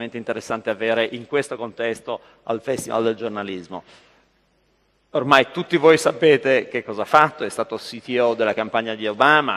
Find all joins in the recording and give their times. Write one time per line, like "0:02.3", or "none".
0:02.3